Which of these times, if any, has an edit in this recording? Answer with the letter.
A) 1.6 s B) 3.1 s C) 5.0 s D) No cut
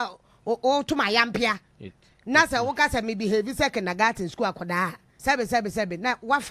C